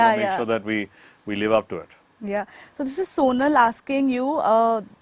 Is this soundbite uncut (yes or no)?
yes